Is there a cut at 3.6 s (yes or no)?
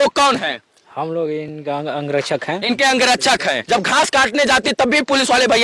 yes